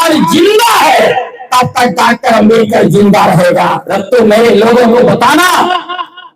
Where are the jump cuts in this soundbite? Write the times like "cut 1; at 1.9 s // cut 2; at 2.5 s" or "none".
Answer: cut 1; at 3.9 s

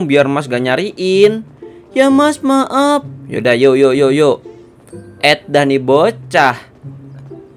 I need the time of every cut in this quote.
cut 1; at 6.7 s

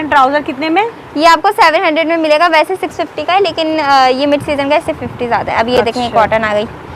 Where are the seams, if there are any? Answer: none

